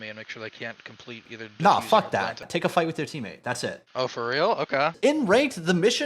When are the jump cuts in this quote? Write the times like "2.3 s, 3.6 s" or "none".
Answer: 2.4 s, 5.0 s